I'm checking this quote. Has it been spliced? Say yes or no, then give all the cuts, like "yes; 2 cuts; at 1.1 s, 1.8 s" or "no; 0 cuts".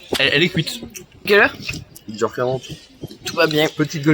yes; 1 cut; at 1.3 s